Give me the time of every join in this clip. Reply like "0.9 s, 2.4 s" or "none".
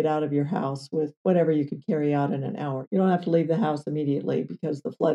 1.2 s, 2.8 s